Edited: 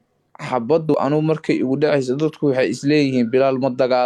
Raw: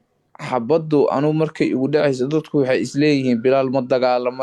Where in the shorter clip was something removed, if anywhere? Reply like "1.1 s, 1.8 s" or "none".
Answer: 0.9 s